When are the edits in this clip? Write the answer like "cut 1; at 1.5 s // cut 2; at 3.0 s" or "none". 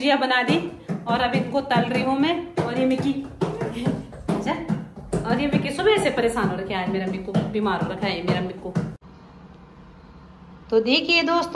cut 1; at 8.9 s